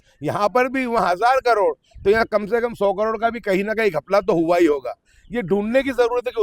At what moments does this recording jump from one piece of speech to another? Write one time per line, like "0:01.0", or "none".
none